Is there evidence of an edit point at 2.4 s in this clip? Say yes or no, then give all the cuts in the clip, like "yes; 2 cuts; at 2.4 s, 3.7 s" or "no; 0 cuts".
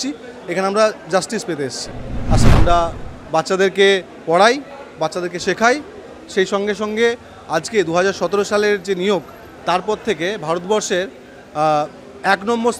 yes; 1 cut; at 2.4 s